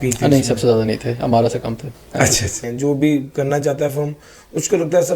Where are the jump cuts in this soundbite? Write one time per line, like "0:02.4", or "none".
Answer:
0:02.7